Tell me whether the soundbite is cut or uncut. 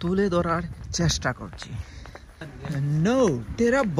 cut